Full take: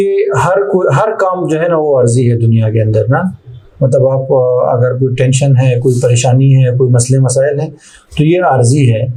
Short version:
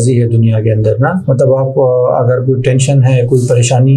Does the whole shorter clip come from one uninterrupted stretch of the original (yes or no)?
no